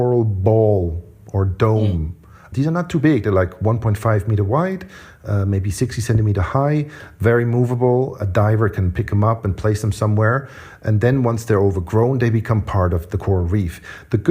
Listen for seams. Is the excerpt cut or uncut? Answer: cut